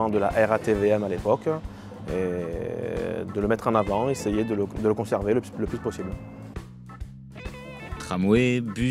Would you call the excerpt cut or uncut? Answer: uncut